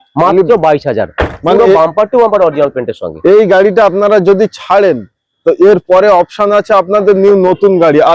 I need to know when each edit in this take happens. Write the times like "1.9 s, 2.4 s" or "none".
none